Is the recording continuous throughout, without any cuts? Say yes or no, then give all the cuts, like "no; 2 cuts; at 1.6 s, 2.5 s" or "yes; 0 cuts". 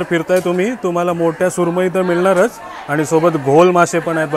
yes; 0 cuts